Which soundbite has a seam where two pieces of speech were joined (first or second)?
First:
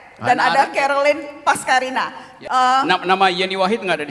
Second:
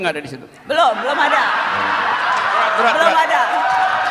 first